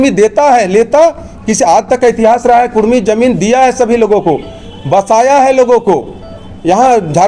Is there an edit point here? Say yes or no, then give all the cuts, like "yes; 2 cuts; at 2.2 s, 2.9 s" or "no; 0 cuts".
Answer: no; 0 cuts